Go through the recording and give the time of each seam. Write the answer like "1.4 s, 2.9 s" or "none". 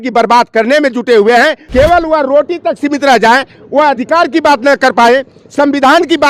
1.6 s